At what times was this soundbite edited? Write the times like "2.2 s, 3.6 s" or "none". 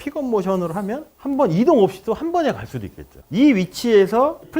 3.2 s